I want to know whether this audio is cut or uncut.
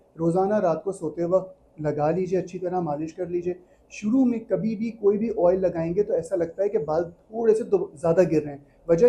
uncut